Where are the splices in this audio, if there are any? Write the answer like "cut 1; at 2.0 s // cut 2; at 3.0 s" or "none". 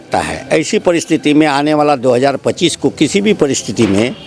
none